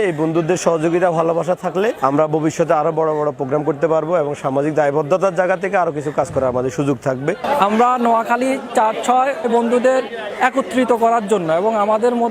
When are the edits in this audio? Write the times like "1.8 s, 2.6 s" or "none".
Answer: 2.0 s, 7.4 s